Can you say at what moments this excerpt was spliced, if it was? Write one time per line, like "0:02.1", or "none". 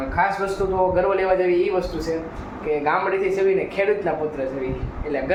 none